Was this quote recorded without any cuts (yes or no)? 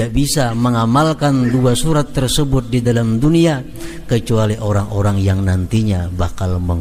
yes